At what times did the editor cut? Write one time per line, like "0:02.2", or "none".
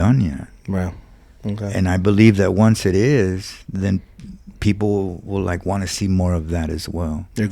none

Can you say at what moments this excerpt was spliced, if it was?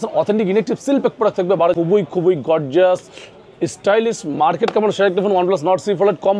0:01.8

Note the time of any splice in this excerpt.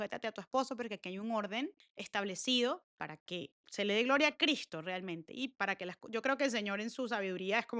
none

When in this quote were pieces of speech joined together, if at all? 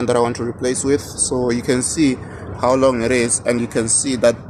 none

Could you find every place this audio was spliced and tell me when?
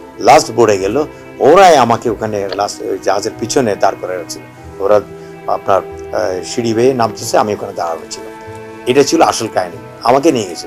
none

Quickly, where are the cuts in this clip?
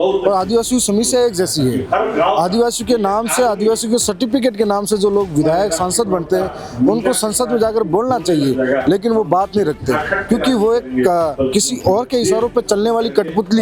none

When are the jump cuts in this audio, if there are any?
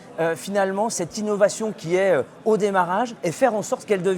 0:03.2

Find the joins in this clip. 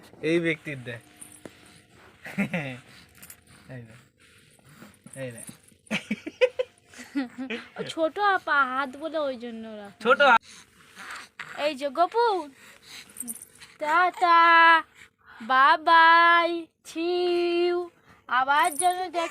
0:10.4

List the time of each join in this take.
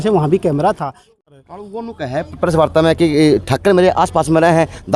0:01.1

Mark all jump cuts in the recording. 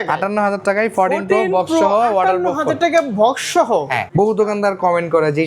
0:04.0

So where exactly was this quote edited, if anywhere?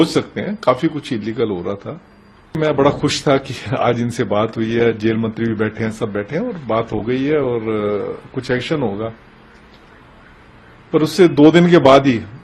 0:02.6

